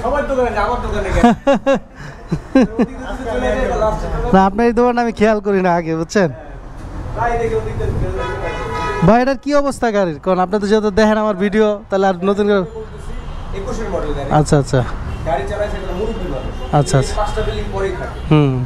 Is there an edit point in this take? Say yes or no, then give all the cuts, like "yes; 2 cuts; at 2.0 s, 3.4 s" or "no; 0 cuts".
no; 0 cuts